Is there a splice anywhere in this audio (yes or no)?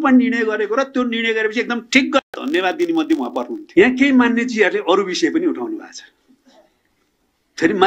yes